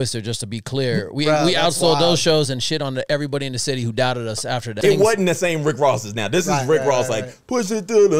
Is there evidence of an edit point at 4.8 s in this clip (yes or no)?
yes